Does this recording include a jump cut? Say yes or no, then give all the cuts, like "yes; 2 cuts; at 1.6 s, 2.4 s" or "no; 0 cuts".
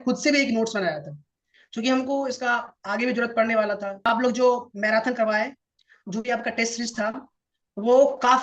yes; 1 cut; at 4.0 s